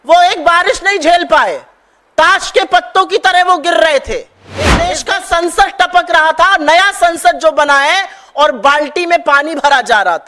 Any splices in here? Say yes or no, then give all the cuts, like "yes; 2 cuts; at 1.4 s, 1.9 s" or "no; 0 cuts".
yes; 1 cut; at 4.9 s